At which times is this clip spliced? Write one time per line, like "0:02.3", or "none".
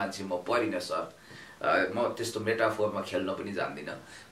none